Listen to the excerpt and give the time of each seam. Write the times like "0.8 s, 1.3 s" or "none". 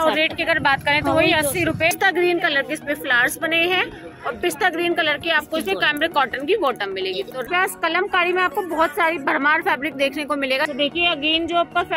1.9 s, 7.5 s, 10.7 s